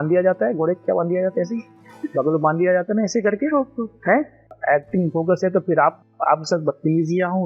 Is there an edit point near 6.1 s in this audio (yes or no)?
no